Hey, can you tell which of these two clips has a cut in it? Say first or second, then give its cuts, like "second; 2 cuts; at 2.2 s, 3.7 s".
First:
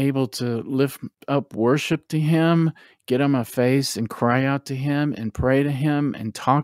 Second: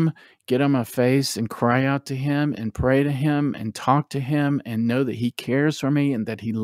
first; 1 cut; at 1.2 s